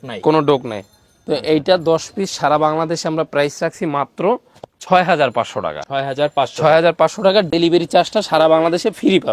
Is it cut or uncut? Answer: uncut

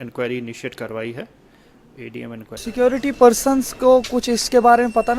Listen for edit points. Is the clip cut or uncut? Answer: cut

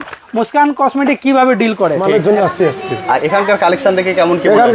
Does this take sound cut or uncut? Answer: cut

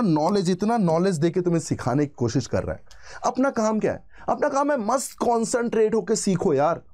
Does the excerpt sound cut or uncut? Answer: uncut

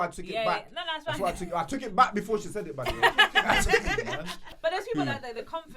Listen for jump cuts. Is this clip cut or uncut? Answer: cut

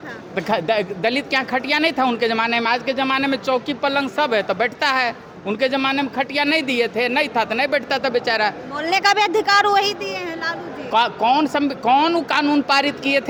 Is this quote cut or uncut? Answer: uncut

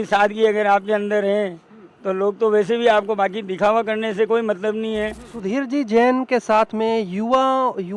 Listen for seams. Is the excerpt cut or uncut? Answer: cut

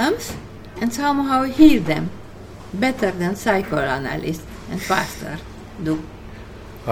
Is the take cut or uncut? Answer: uncut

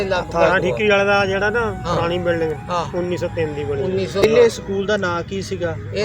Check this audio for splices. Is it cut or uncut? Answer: cut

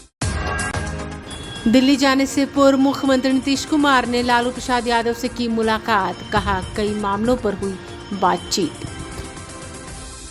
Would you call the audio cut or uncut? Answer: cut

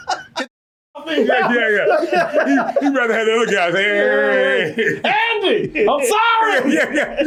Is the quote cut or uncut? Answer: uncut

